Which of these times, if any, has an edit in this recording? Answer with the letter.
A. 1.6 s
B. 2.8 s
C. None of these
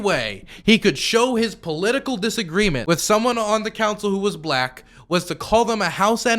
B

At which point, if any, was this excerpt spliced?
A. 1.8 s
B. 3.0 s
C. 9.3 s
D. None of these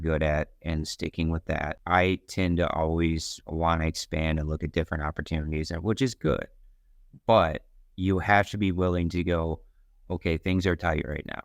A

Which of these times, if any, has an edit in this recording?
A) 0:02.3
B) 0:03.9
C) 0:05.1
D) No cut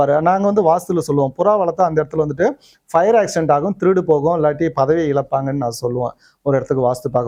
D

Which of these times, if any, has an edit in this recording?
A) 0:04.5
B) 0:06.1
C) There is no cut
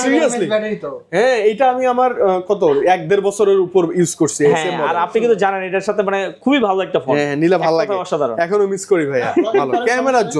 C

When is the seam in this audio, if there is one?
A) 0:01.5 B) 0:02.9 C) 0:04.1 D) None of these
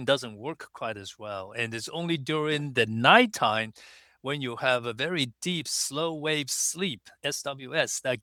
D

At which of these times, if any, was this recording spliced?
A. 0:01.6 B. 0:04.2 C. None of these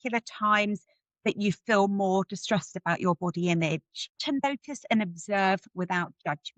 B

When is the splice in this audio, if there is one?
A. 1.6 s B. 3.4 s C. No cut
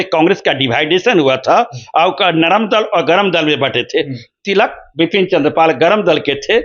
C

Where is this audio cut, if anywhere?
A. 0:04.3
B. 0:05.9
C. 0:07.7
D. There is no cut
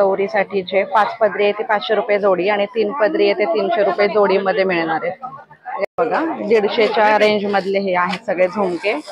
B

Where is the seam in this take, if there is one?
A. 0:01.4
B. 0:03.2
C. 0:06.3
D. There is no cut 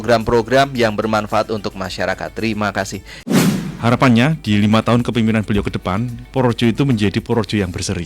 B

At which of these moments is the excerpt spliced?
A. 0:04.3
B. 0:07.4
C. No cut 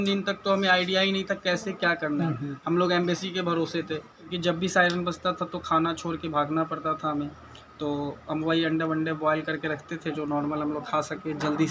A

